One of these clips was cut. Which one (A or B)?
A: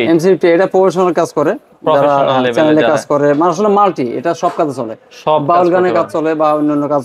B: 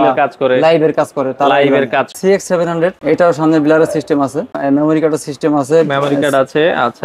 B